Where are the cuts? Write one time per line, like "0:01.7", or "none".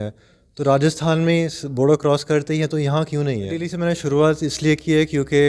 0:03.8